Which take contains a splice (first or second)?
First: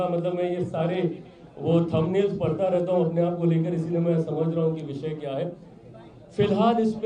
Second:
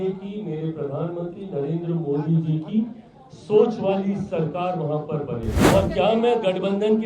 second